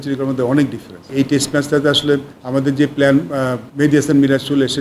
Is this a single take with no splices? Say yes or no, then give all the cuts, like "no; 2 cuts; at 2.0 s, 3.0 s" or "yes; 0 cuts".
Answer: no; 3 cuts; at 1.0 s, 2.4 s, 3.6 s